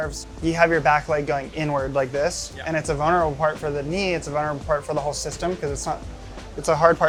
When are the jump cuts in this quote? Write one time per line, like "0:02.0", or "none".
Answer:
none